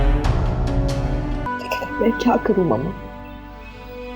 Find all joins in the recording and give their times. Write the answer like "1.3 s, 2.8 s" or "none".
1.5 s